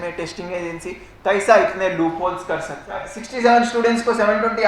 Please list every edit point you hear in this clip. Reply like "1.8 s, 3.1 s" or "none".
3.2 s

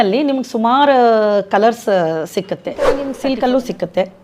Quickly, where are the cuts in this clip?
3.0 s

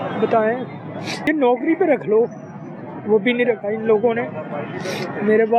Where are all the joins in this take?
1.2 s

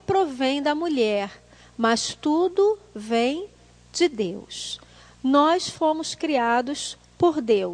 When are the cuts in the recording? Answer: 5.5 s

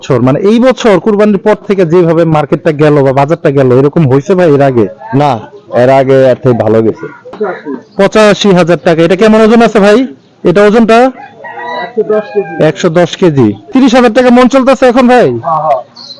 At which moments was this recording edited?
7.4 s, 13.7 s

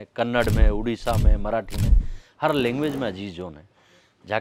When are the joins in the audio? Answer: none

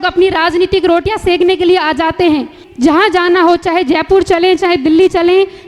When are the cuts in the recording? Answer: 2.6 s

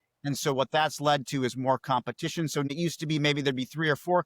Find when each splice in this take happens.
2.7 s

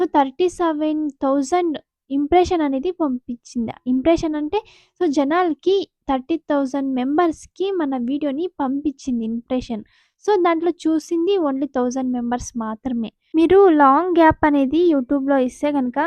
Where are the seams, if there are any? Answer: 13.2 s

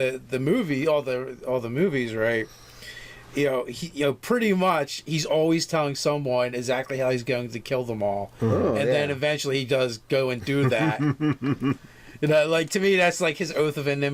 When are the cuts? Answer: 12.8 s

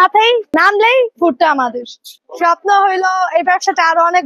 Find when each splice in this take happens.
2.1 s

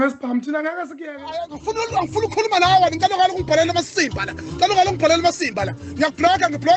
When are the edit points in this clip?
1.3 s

